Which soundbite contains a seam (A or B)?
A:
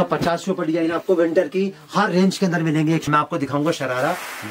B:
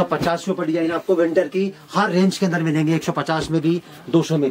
A